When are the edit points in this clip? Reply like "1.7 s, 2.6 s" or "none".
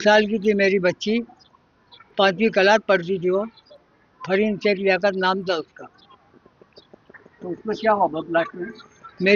2.8 s